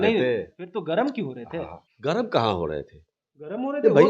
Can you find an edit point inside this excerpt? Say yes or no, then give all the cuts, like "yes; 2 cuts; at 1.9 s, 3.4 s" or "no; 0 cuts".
yes; 1 cut; at 1.8 s